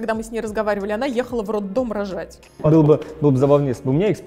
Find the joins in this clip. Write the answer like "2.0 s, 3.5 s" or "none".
2.6 s

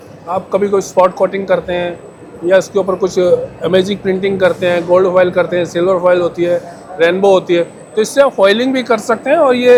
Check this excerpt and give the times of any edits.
none

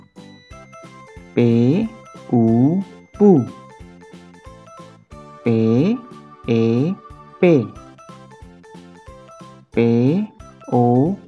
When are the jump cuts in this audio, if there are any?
7.8 s, 9.7 s

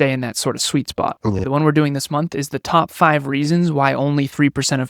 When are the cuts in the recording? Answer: 1.4 s

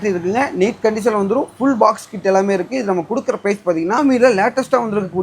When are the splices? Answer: 4.0 s

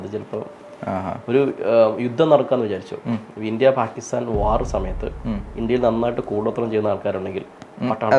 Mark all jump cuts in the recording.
none

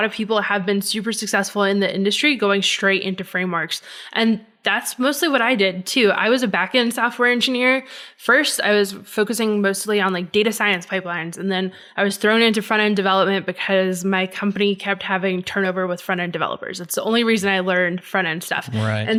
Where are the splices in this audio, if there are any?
none

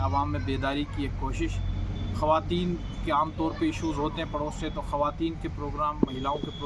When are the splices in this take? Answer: none

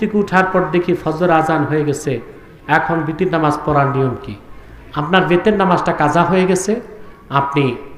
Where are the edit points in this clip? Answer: none

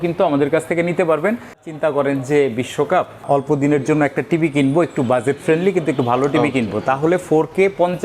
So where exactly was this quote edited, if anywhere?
1.7 s, 3.3 s

